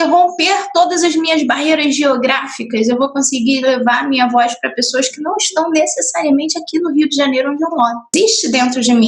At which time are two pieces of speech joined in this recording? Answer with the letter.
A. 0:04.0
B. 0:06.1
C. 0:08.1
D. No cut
C